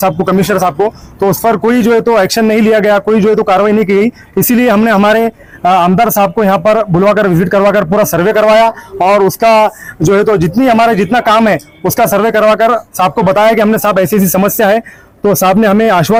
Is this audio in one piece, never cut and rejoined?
yes; 0 cuts

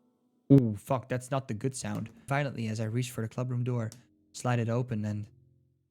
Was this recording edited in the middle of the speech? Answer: yes; 1 cut; at 2.2 s

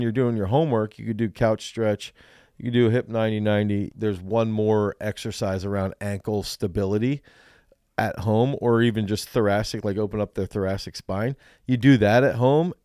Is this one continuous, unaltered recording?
no; 1 cut; at 3.9 s

